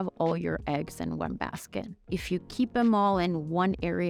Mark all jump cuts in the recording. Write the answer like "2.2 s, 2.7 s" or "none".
2.0 s